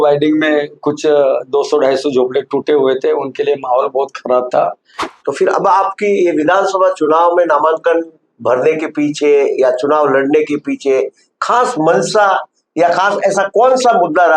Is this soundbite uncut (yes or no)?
no